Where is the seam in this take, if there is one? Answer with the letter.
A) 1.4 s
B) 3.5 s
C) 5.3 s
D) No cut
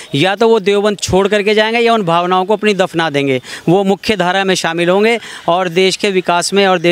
D